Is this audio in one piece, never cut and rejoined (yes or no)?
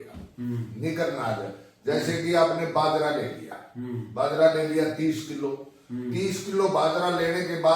yes